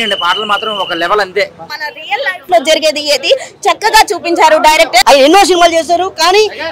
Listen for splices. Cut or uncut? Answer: cut